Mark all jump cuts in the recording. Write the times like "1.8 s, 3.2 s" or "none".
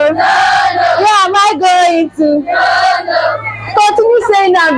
none